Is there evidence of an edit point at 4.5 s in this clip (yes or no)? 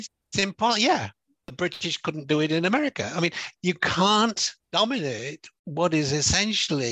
yes